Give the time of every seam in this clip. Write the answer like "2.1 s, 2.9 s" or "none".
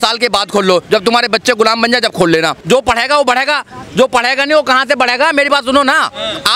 2.6 s